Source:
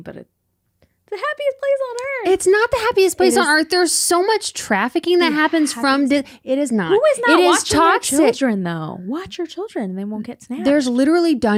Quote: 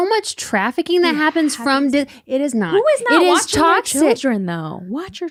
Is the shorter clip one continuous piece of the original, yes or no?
yes